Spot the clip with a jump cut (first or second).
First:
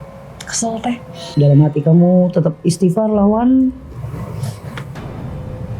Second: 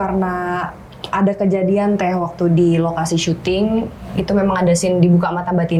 first